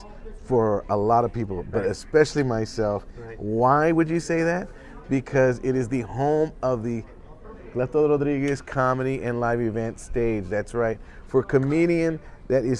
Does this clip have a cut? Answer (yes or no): no